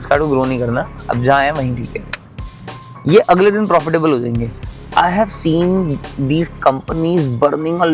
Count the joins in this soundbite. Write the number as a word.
zero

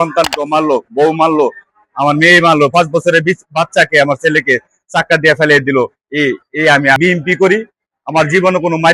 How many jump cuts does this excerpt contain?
one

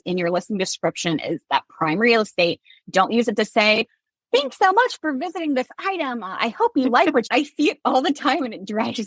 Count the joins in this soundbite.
one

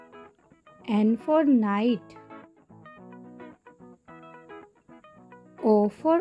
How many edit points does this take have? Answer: three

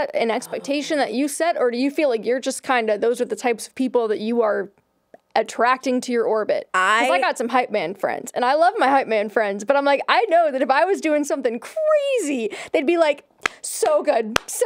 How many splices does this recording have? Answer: one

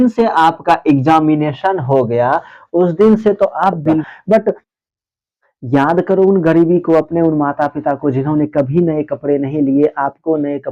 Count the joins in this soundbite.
one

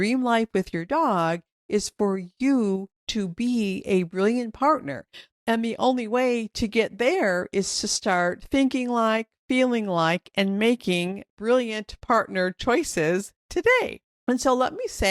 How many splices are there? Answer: two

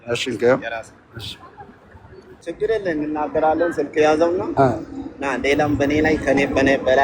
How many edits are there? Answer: one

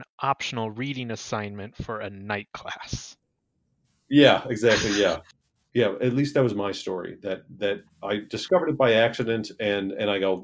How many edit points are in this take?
one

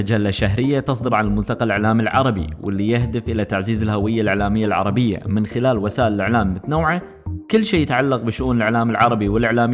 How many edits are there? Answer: zero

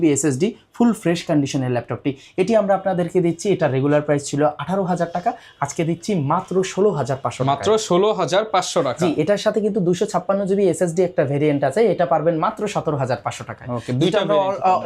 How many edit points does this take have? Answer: zero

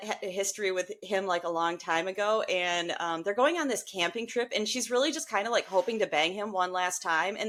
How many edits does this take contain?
zero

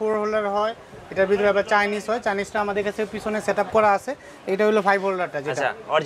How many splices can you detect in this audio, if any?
zero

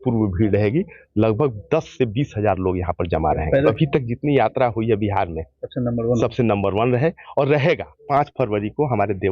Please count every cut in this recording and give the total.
two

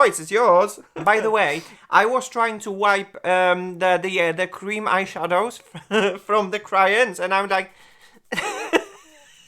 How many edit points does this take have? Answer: one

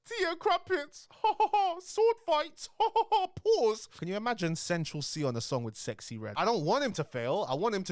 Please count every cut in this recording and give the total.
two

